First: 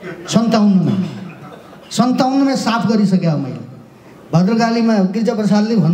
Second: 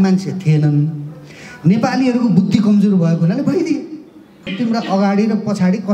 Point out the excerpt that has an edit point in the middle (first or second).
second